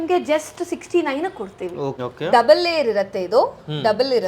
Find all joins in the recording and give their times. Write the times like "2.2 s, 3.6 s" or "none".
2.0 s

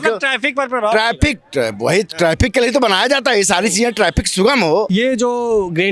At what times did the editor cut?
4.9 s

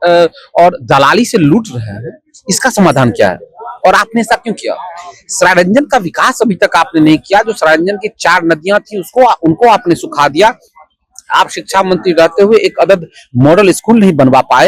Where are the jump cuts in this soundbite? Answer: none

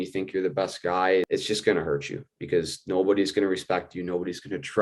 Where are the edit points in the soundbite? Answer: 1.3 s

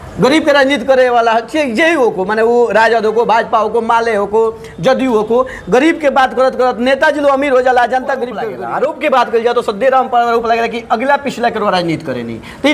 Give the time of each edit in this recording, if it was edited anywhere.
8.5 s

